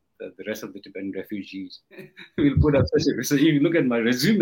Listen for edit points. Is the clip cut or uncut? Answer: cut